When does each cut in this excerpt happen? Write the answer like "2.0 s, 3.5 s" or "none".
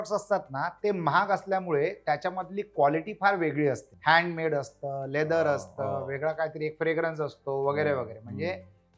3.9 s